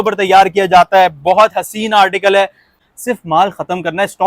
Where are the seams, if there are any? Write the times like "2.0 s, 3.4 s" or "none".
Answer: 2.9 s